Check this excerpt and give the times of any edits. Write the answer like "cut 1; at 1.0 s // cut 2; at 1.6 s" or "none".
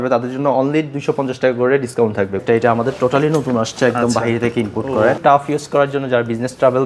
cut 1; at 2.4 s // cut 2; at 5.2 s